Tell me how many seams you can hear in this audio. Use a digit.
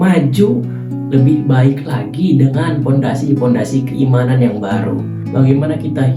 1